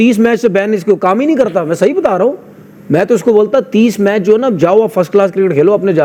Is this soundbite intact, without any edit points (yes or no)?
yes